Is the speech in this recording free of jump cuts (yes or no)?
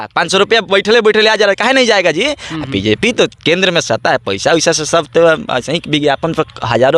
yes